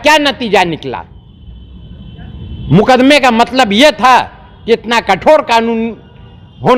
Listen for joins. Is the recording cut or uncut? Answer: uncut